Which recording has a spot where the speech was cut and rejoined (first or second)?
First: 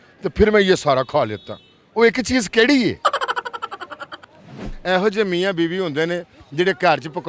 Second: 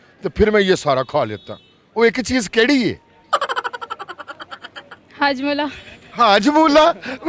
first